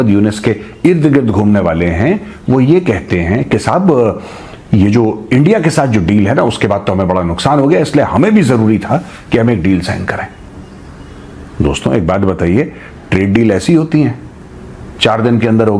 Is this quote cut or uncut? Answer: uncut